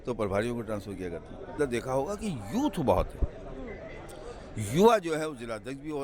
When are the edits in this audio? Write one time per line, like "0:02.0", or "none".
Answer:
0:01.6